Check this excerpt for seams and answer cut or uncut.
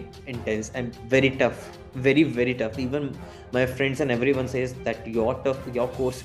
uncut